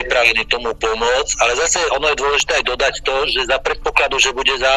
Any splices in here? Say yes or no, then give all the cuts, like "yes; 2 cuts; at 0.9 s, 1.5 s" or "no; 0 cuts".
no; 0 cuts